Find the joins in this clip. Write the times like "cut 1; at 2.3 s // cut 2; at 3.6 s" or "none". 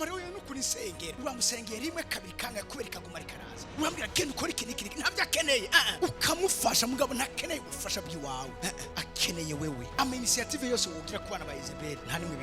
cut 1; at 5.9 s